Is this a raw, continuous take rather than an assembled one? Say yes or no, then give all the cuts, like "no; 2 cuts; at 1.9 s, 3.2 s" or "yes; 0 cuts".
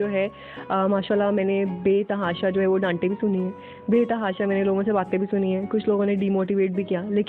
yes; 0 cuts